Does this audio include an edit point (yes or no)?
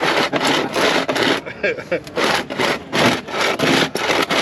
no